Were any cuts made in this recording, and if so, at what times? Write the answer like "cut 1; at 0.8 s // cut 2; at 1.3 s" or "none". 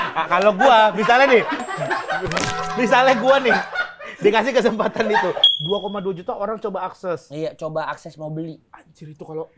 cut 1; at 5.5 s